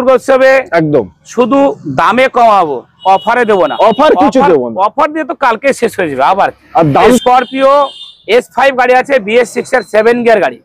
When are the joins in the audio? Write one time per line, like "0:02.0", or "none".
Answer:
0:07.2